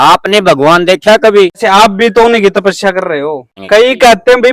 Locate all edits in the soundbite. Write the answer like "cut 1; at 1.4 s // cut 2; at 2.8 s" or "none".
cut 1; at 1.6 s // cut 2; at 3.5 s